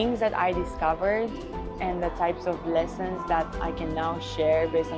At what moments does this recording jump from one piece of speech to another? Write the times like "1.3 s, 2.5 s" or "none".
none